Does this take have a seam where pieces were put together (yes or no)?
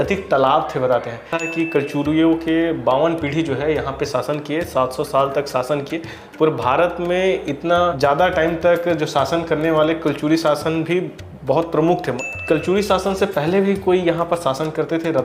yes